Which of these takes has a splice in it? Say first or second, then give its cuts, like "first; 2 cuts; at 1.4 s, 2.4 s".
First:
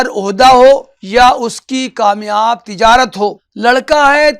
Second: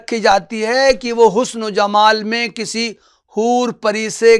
first; 2 cuts; at 1.0 s, 3.5 s